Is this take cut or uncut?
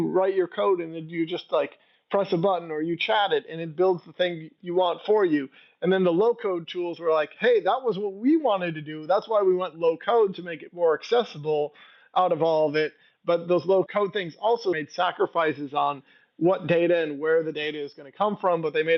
uncut